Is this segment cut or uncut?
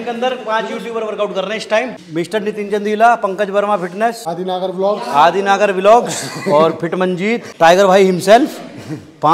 cut